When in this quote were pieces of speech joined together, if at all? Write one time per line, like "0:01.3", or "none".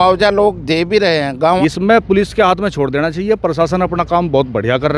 0:01.6